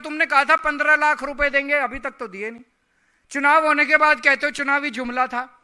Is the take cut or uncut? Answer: uncut